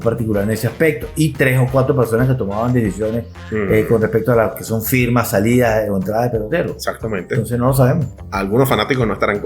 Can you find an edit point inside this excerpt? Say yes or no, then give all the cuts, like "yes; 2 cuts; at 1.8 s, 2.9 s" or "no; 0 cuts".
yes; 1 cut; at 8.1 s